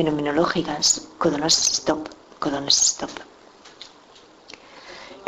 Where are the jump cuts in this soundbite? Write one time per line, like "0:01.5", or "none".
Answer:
none